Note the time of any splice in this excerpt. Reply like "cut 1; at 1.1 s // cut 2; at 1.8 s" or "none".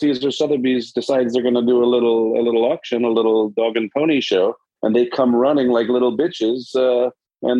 none